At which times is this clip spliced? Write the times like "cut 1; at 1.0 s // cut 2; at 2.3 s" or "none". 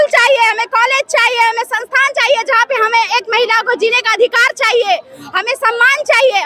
none